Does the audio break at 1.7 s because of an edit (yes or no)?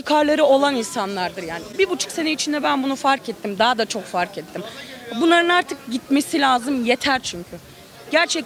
no